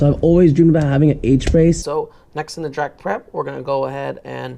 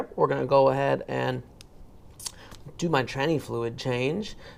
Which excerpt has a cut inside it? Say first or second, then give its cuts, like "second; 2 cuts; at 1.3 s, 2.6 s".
first; 1 cut; at 1.8 s